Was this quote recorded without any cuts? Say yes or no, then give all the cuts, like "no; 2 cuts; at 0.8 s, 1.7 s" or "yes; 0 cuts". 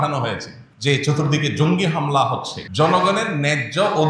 no; 1 cut; at 2.7 s